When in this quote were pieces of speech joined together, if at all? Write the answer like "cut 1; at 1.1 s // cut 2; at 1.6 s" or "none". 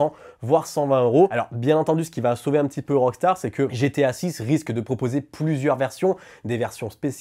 none

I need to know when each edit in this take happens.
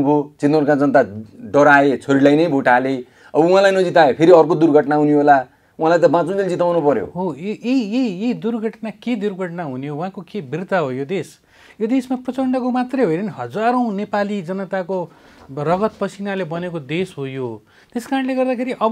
none

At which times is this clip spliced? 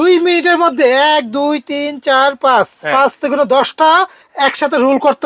cut 1; at 4.2 s

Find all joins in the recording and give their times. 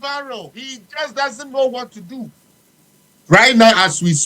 cut 1; at 2.4 s

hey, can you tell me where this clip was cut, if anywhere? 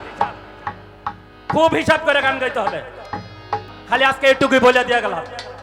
cut 1; at 3.7 s

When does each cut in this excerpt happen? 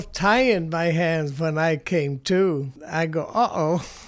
cut 1; at 2.8 s

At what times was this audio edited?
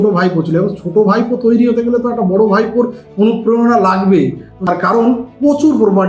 cut 1; at 4.5 s

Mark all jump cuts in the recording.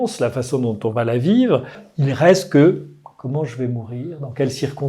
cut 1; at 1.8 s

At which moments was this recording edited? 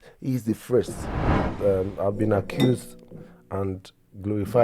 cut 1; at 1.5 s

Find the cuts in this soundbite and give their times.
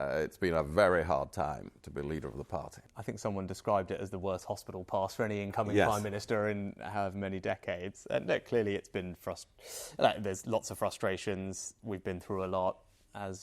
cut 1; at 2.9 s

